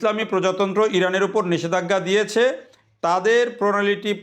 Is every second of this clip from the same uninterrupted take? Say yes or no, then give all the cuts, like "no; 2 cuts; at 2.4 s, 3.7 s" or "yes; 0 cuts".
yes; 0 cuts